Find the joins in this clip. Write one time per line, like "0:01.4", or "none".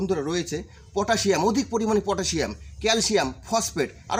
none

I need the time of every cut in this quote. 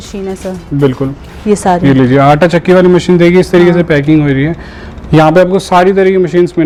none

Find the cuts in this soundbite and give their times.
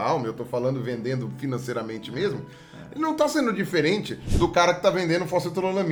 none

